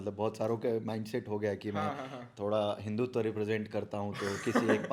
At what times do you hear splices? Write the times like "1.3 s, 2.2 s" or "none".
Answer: none